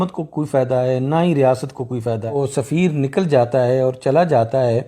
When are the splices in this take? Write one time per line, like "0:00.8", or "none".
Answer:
0:02.3